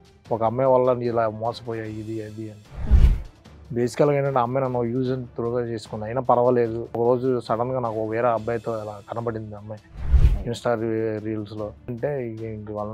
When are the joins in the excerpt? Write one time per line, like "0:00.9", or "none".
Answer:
0:07.0
0:11.9